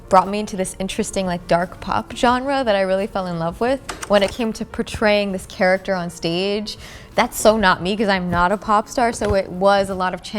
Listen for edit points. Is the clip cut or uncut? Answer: uncut